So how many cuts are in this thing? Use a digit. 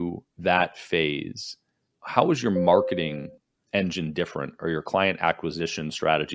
1